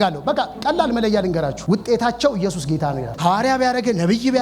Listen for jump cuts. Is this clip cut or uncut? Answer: cut